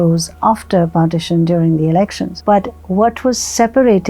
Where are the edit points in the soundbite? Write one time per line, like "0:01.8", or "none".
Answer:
0:02.3